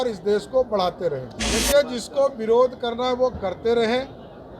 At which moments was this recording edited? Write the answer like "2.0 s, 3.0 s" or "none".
1.4 s